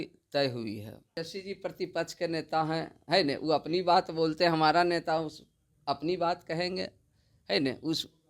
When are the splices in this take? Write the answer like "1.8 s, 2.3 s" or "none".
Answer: 1.2 s